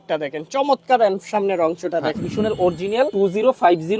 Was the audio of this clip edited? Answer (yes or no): yes